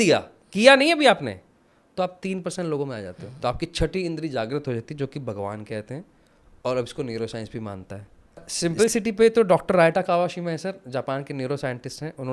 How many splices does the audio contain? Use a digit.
2